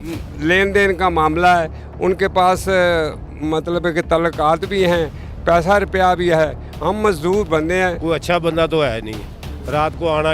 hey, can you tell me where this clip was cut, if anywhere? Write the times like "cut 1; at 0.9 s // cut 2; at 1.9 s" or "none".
cut 1; at 8.0 s